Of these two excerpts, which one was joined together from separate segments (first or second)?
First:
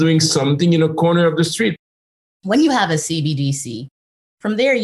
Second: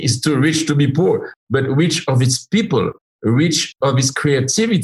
first